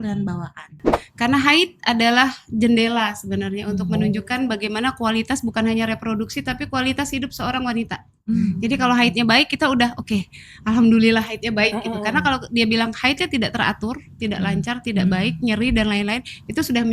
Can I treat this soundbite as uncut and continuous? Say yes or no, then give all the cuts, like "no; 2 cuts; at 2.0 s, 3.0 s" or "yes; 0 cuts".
no; 1 cut; at 0.9 s